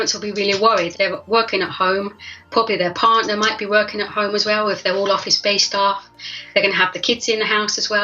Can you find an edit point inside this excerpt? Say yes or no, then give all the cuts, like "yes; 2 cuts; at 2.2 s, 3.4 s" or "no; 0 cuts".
yes; 2 cuts; at 0.9 s, 2.4 s